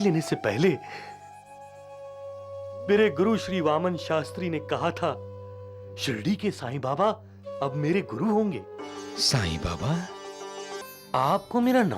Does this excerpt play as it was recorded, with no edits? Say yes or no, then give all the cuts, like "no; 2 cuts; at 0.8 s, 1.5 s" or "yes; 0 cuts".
no; 1 cut; at 10.8 s